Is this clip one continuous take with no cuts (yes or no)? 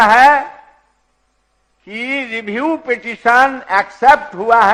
yes